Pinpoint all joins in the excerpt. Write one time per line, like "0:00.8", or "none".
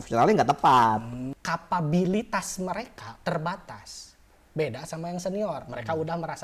0:01.3